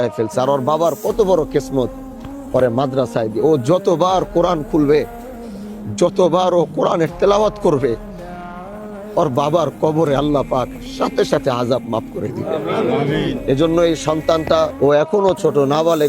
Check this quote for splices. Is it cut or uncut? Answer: cut